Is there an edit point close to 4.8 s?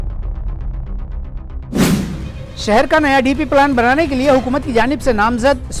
no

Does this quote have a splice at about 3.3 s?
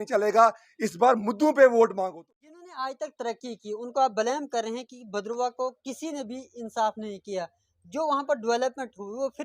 no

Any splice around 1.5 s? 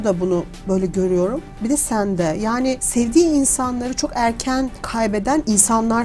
no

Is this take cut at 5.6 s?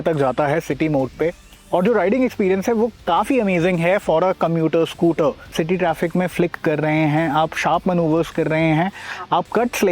yes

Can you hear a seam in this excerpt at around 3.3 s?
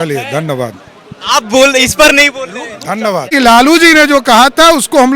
yes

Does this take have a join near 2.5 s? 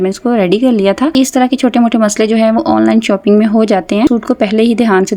no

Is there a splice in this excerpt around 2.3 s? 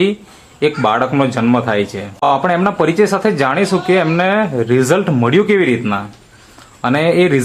yes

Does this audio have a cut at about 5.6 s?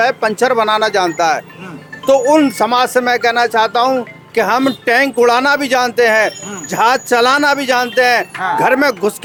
no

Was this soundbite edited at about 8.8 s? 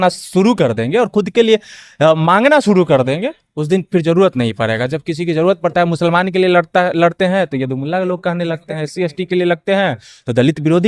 no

